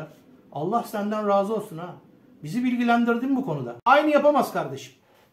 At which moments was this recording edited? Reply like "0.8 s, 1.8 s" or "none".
3.8 s